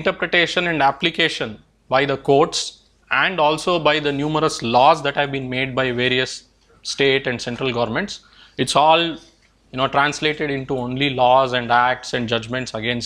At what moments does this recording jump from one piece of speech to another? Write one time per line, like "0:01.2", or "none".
none